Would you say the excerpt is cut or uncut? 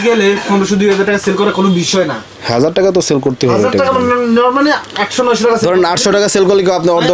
uncut